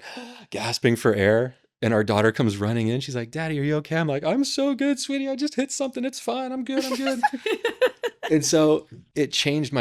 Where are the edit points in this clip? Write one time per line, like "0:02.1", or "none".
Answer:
none